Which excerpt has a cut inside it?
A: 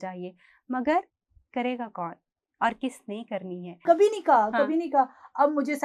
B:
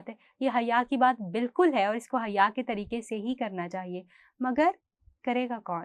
A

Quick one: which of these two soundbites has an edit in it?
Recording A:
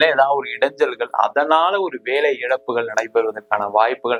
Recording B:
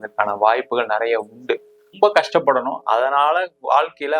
B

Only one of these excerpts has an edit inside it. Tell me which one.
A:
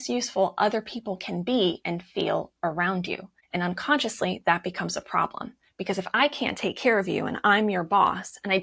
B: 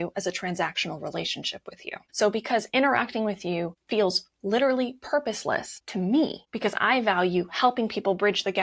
B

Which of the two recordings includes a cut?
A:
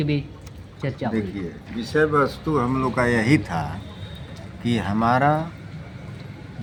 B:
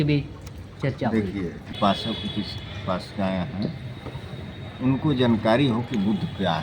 B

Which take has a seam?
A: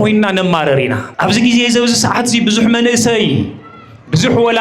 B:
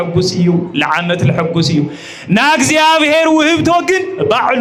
A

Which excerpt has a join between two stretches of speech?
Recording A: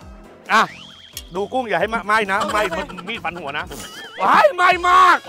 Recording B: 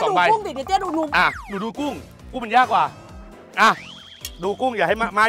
A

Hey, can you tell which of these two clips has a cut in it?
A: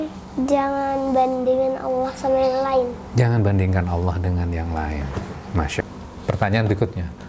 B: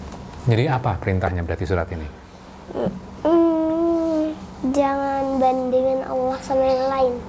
A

